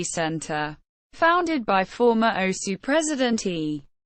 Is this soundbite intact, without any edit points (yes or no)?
yes